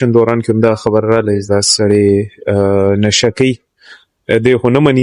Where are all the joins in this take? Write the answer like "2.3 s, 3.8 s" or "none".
none